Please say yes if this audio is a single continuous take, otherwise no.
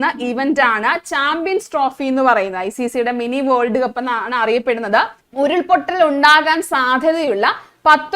no